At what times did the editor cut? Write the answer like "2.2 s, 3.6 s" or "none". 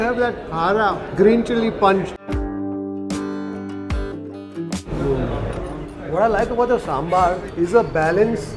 2.1 s